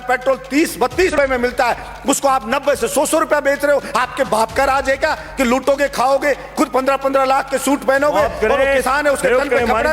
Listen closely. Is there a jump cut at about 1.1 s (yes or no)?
yes